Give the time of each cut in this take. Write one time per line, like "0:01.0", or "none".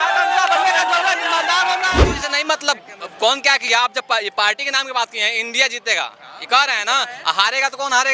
0:02.2